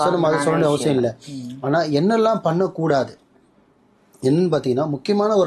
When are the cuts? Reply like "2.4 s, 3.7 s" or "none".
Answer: none